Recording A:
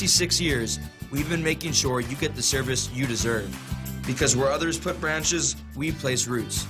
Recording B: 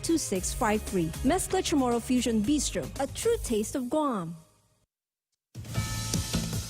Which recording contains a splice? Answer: B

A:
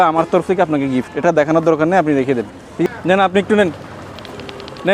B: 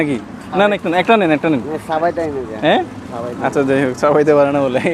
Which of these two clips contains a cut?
A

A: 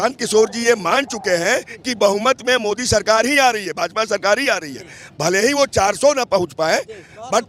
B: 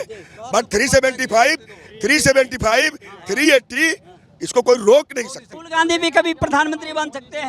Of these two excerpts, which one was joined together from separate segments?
B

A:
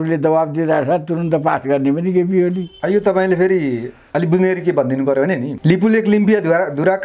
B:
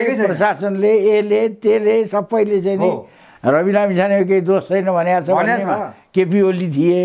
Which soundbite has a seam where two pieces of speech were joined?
A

